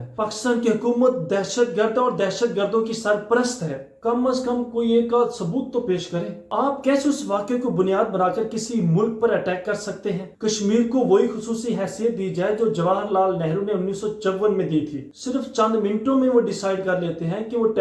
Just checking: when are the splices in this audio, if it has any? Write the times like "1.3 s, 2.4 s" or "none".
3.8 s, 6.4 s, 10.3 s, 15.0 s